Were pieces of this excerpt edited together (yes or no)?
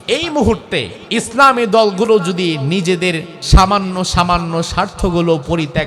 yes